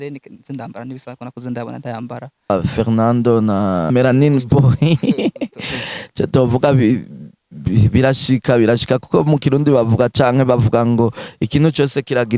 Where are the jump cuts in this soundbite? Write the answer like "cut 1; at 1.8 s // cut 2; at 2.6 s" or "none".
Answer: cut 1; at 2.5 s // cut 2; at 3.9 s